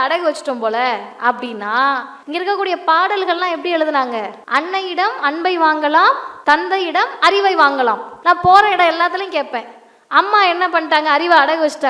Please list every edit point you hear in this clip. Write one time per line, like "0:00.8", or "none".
0:02.1
0:04.4
0:06.3
0:08.1

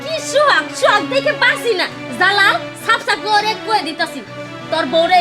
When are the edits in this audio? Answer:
none

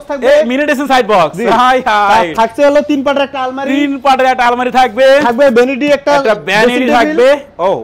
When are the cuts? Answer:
none

